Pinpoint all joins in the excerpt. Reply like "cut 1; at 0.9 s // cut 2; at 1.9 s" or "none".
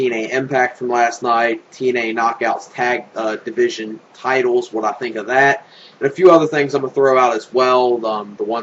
none